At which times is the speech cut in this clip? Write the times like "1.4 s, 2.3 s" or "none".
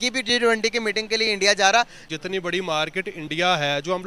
2.0 s